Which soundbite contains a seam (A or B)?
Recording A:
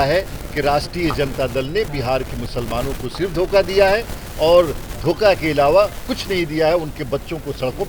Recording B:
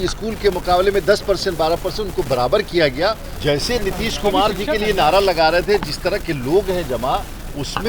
B